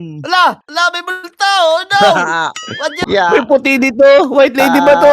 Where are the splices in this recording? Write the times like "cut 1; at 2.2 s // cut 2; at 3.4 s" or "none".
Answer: cut 1; at 3.0 s